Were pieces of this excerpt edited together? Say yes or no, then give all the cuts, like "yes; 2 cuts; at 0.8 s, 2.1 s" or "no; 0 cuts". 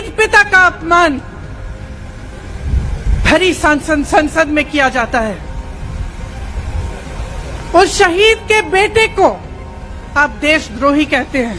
no; 0 cuts